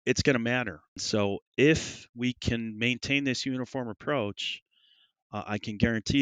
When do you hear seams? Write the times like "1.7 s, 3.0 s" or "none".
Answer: 0.9 s